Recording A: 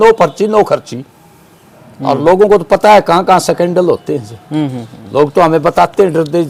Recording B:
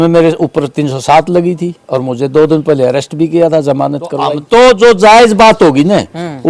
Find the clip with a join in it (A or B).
B